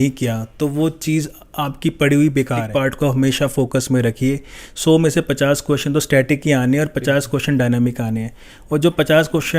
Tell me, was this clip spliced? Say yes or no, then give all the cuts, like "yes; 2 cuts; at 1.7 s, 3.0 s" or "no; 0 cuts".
yes; 1 cut; at 2.7 s